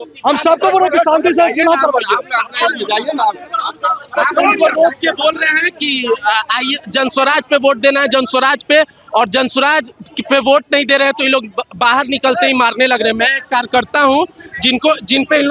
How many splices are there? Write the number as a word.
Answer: zero